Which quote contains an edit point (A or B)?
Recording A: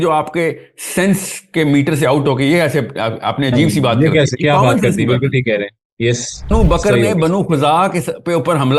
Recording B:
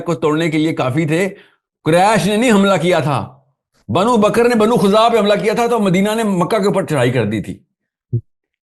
A